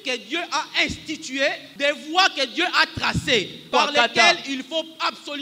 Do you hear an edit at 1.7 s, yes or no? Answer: yes